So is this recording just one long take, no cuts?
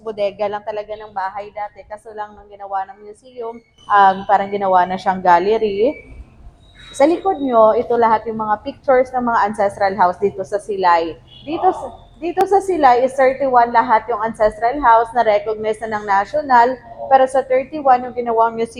yes; 0 cuts

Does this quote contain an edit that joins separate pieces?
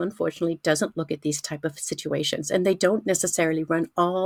no; 0 cuts

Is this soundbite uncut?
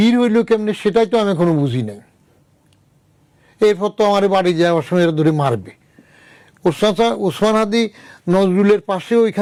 yes; 0 cuts

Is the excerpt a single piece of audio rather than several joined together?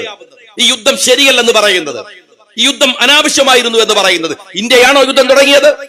yes; 0 cuts

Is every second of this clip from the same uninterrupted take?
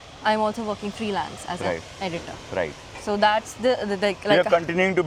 yes; 0 cuts

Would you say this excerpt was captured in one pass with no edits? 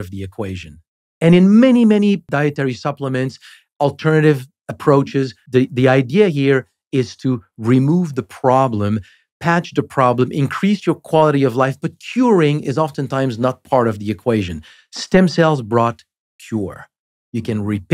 no; 2 cuts; at 2.2 s, 5.4 s

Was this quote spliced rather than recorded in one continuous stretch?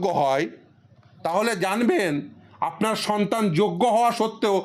no; 0 cuts

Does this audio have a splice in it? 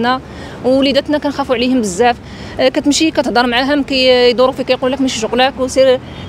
no; 0 cuts

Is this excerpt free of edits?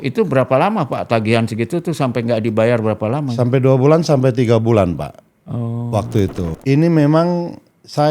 no; 1 cut; at 6.5 s

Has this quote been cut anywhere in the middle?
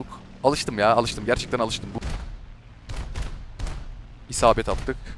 yes; 1 cut; at 1.9 s

